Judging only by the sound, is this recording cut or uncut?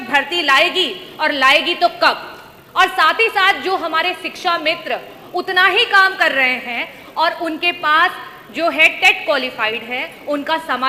uncut